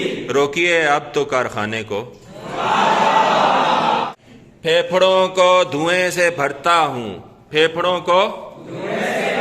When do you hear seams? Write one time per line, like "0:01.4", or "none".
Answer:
0:04.1

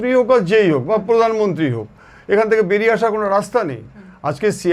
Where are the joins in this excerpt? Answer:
none

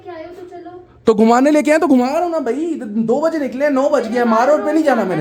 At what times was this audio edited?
none

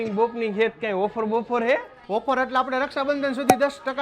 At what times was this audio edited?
none

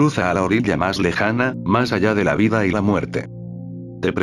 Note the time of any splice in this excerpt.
0:03.3

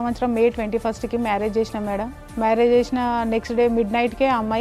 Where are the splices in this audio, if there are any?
none

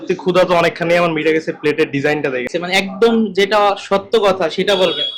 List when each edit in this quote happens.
0:02.5

